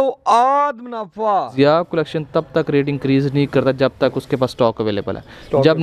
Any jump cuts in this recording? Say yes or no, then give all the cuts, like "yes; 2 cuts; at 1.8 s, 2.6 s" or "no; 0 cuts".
yes; 1 cut; at 1.5 s